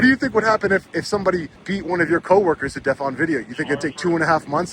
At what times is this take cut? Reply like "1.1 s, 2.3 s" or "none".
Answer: 1.6 s